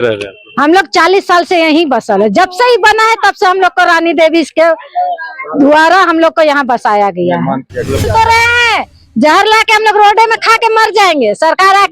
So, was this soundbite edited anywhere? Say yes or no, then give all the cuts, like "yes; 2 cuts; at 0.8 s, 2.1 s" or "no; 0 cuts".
yes; 1 cut; at 8.0 s